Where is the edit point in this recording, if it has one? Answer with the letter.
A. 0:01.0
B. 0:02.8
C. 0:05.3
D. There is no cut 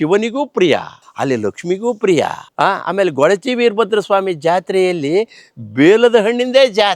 A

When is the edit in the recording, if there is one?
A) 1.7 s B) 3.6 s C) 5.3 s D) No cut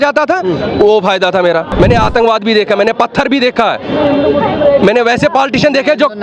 A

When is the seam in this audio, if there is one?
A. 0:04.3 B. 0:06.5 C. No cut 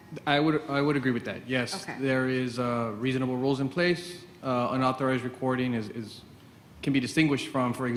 C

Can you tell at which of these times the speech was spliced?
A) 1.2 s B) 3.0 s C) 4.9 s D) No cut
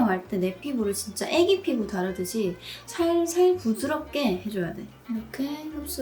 C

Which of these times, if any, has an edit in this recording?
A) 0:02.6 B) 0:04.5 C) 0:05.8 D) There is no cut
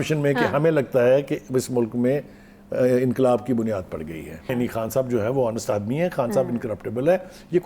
B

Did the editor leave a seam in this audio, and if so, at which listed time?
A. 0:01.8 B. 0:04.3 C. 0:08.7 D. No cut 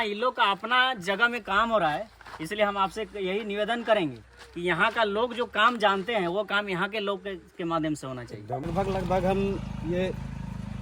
C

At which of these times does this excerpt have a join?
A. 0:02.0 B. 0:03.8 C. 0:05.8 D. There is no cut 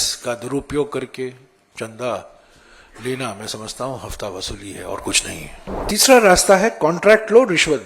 C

